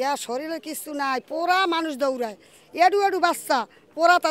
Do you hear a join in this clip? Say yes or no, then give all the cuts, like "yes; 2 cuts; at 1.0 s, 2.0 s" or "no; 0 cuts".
no; 0 cuts